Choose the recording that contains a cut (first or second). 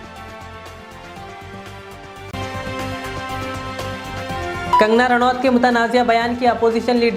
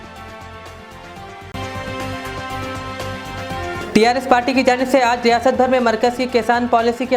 second